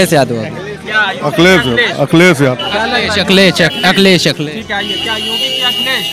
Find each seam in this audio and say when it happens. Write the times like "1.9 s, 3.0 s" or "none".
none